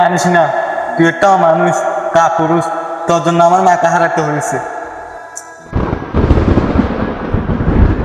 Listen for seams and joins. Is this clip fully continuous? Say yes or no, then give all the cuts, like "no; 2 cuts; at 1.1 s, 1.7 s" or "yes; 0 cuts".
yes; 0 cuts